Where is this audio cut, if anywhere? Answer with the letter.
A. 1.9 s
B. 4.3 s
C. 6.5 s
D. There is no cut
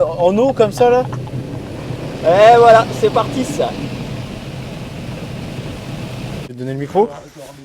C